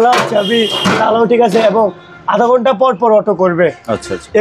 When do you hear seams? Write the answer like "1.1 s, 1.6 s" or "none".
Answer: none